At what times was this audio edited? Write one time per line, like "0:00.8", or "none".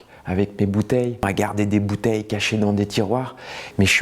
0:01.2